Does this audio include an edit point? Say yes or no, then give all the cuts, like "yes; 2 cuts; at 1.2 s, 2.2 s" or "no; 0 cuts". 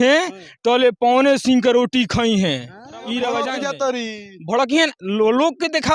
yes; 1 cut; at 3.5 s